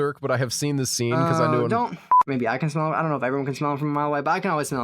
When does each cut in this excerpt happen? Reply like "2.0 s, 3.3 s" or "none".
2.0 s